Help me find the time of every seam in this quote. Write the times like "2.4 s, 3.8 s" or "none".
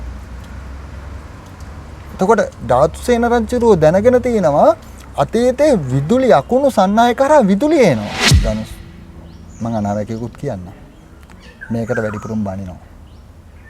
8.3 s